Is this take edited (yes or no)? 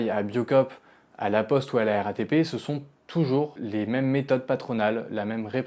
no